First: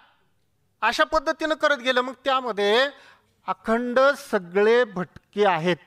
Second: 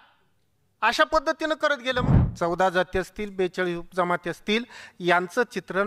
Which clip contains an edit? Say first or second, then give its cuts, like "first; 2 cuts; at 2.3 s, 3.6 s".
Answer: second; 1 cut; at 2.1 s